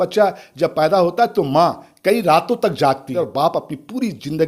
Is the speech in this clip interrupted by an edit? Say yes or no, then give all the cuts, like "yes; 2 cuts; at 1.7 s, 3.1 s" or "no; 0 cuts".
yes; 1 cut; at 3.1 s